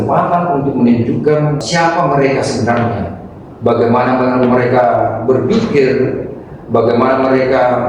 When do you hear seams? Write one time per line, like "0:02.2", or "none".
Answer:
0:01.6